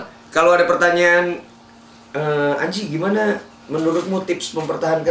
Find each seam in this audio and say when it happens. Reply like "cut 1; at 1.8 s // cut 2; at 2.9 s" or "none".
none